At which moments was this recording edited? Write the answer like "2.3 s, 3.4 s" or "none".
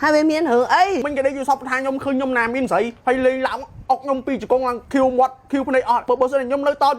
1.1 s, 2.9 s, 4.8 s, 6.0 s